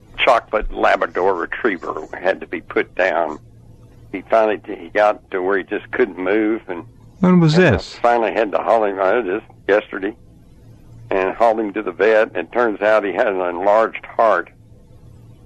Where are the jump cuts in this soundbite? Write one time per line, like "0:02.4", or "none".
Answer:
0:03.9